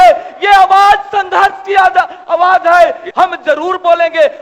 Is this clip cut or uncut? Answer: cut